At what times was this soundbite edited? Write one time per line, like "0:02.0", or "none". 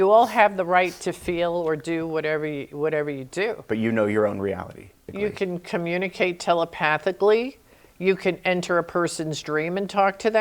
0:05.0